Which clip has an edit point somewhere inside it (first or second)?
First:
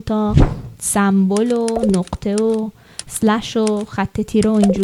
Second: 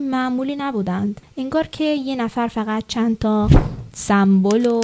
second